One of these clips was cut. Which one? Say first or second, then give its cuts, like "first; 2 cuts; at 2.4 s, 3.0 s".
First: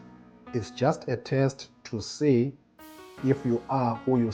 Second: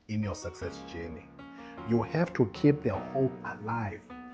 second; 1 cut; at 1.4 s